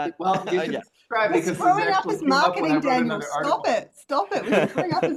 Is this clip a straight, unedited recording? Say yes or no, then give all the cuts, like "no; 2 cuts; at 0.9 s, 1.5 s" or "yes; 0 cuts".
yes; 0 cuts